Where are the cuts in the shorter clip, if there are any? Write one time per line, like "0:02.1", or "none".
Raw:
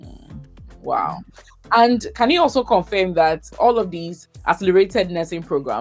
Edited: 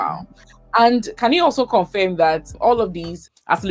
none